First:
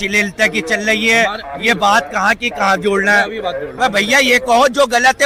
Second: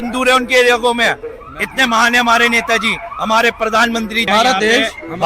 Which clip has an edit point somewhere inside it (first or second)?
second